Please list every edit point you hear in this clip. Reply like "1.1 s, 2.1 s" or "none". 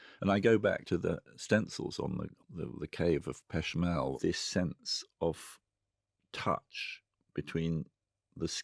0.8 s, 2.3 s, 4.2 s